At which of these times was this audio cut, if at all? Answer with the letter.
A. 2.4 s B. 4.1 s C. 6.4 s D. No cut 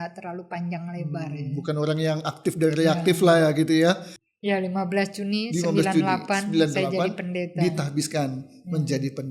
B